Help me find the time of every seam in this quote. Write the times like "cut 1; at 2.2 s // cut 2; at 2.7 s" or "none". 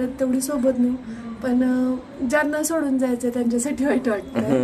none